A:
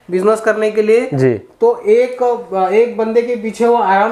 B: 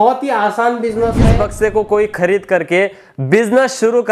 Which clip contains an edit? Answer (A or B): B